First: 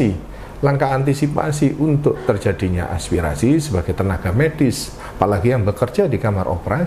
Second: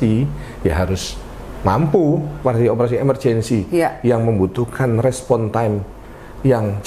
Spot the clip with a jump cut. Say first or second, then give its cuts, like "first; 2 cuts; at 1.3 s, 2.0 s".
second; 1 cut; at 2.4 s